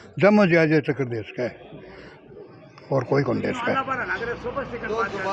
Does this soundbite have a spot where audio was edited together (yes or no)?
no